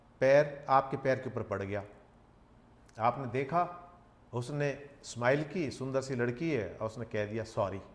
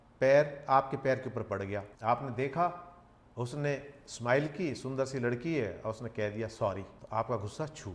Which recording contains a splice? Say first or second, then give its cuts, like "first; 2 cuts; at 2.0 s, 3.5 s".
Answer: second; 2 cuts; at 1.9 s, 7.0 s